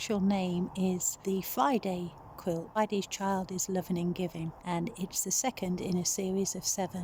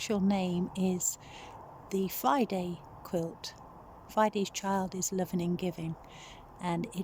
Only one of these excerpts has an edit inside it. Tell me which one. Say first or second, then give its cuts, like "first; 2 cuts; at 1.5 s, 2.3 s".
first; 3 cuts; at 1.1 s, 2.8 s, 4.6 s